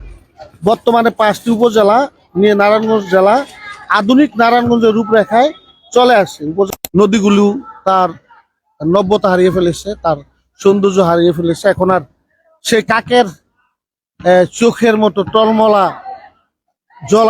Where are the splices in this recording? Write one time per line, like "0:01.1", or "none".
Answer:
0:06.7